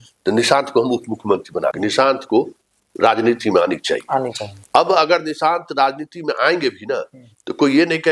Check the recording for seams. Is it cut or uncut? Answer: cut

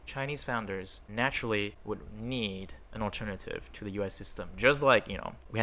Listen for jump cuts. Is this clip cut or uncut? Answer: uncut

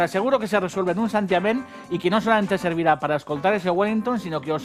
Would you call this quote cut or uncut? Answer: uncut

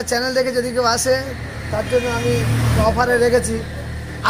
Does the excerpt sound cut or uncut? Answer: cut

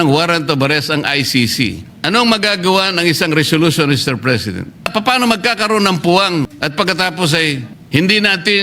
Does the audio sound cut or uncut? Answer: cut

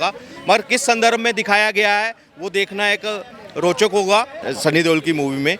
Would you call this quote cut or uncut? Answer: cut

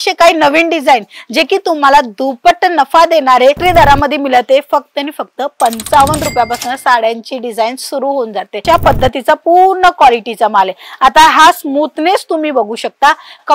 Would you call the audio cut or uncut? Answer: cut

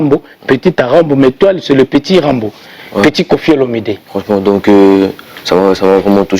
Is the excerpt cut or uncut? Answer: cut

